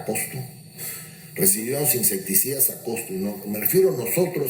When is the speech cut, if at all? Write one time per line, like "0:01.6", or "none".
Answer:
none